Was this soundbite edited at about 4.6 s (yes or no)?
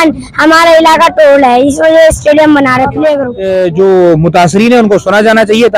no